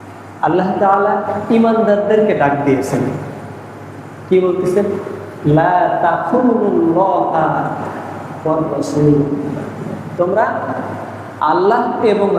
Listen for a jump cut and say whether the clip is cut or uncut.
uncut